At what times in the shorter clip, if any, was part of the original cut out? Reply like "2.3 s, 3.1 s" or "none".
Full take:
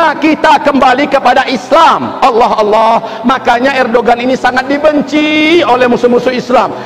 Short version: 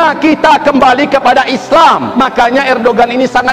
2.1 s